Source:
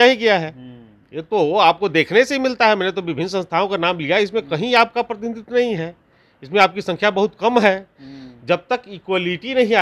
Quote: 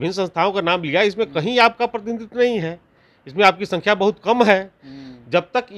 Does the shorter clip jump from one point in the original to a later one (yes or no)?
no